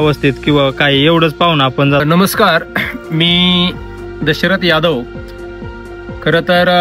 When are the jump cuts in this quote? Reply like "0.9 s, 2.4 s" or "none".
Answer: 2.0 s